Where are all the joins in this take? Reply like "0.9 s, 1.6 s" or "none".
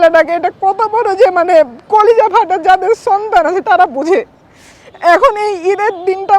none

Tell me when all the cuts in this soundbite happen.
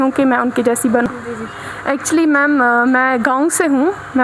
1.1 s

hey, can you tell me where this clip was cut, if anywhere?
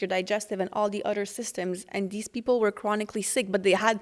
none

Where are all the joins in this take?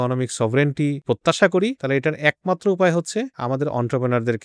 1.0 s, 1.8 s, 3.3 s

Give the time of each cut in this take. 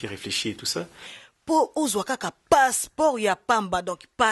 1.0 s

